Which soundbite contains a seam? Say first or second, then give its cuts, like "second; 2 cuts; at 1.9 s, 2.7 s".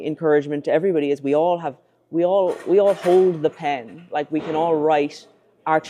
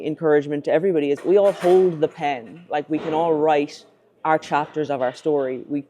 second; 1 cut; at 1.2 s